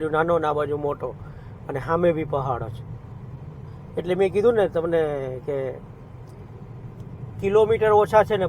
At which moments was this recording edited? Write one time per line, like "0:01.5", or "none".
none